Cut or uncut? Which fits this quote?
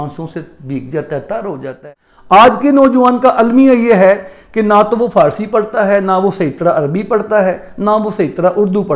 cut